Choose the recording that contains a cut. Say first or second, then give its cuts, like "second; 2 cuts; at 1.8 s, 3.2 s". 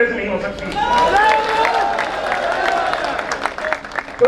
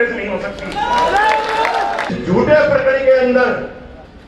second; 1 cut; at 2.1 s